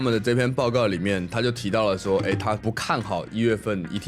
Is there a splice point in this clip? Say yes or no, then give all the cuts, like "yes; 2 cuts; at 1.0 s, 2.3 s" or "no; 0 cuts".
no; 0 cuts